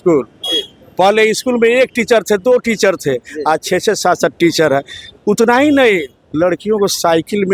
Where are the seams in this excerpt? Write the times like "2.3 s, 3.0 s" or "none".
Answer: none